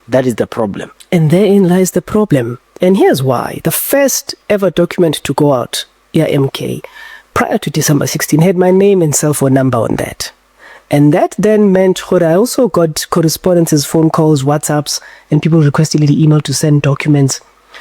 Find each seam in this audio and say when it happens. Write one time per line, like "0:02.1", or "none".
0:02.6